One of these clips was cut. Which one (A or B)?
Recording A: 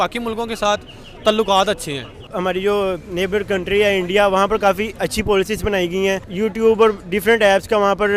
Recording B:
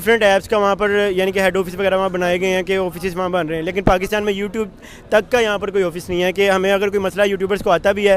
A